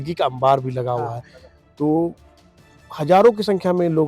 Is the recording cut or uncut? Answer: uncut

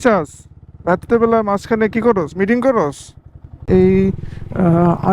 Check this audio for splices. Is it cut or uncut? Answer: cut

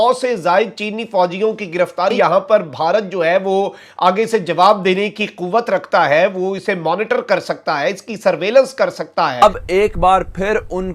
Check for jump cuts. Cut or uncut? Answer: cut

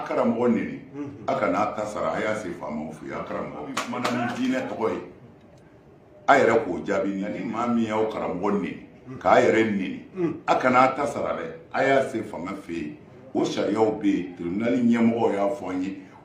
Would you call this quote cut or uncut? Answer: cut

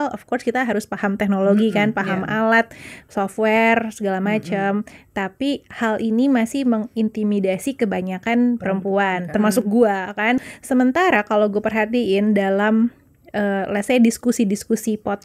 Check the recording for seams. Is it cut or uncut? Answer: cut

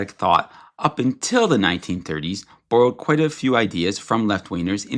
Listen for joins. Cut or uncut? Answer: uncut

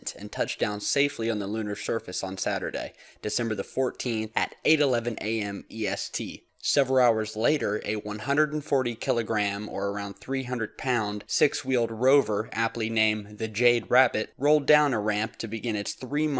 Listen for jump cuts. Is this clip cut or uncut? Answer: uncut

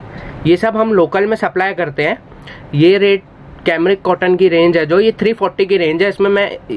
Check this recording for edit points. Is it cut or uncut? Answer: uncut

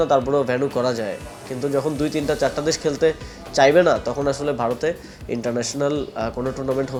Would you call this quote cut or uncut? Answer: uncut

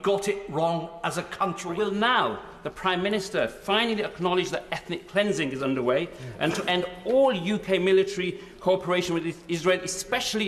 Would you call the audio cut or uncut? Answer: cut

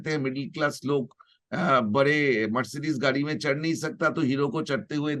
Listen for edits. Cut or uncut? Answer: uncut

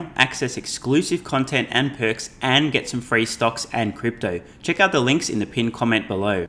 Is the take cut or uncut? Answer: uncut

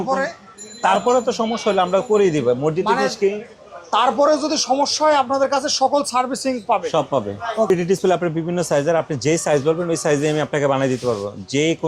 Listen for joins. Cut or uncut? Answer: cut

